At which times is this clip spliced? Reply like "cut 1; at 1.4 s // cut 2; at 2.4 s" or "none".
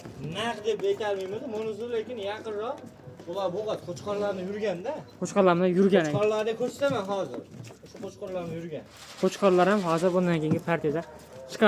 none